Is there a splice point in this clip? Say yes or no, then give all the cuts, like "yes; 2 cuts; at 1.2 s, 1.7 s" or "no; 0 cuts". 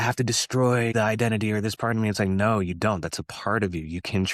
yes; 1 cut; at 0.9 s